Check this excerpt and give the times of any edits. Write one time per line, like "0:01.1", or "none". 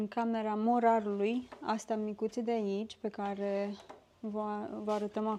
none